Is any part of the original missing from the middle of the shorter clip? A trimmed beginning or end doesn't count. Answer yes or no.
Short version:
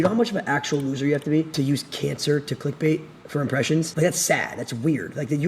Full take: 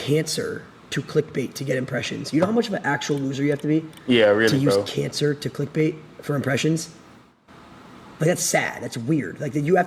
yes